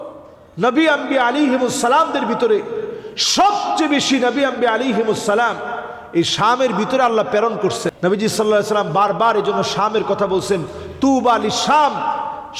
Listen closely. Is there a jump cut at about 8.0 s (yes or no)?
yes